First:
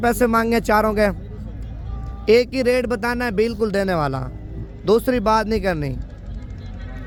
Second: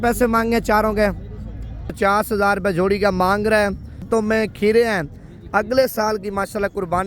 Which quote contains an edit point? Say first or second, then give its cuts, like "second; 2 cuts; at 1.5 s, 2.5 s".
second; 2 cuts; at 1.9 s, 4.0 s